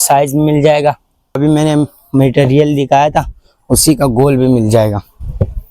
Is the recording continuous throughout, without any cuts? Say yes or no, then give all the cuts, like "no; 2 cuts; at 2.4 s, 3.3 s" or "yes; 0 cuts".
no; 1 cut; at 1.4 s